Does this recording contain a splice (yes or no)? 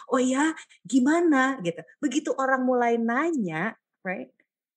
no